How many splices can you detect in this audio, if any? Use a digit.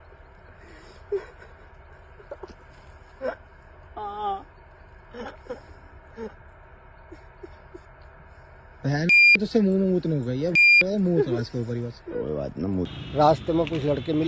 1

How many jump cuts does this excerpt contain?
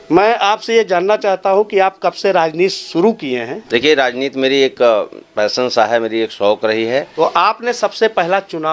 2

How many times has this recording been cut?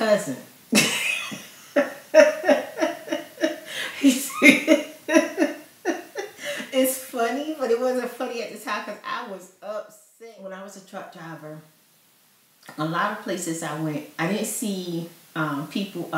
1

